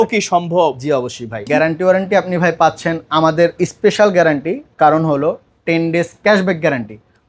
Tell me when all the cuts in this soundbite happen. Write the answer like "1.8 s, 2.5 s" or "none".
1.4 s